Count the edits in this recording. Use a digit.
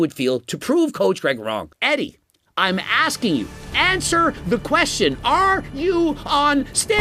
1